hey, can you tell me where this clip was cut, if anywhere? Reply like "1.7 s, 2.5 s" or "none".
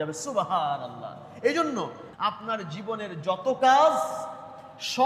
2.0 s